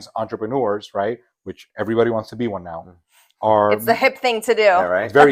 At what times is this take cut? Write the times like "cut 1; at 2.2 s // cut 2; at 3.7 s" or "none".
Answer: none